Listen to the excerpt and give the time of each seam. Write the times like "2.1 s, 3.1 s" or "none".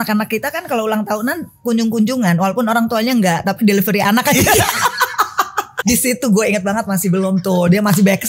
5.7 s